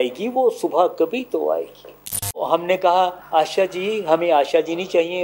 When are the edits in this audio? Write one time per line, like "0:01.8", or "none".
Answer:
0:02.4
0:03.2